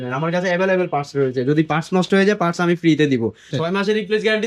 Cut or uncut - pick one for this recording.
cut